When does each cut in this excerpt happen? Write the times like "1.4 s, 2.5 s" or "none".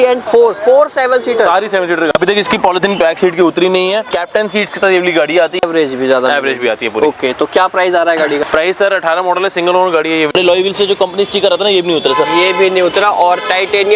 2.1 s, 4.1 s, 5.6 s, 8.4 s, 10.3 s